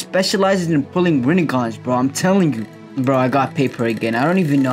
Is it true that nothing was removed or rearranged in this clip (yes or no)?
no